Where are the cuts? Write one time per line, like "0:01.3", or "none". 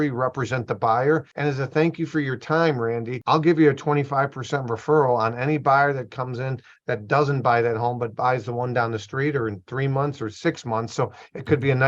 0:01.3
0:03.1